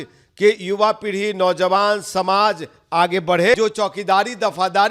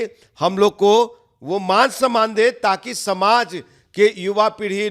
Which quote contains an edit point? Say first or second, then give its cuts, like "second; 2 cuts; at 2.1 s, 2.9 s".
first; 1 cut; at 3.5 s